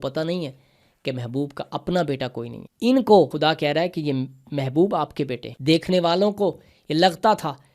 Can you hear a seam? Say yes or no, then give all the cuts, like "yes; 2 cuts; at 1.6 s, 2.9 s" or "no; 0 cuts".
yes; 3 cuts; at 2.6 s, 3.3 s, 5.5 s